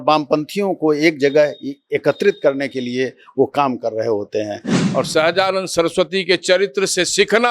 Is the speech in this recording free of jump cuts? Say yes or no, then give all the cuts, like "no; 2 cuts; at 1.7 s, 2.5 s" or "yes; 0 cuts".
no; 1 cut; at 4.7 s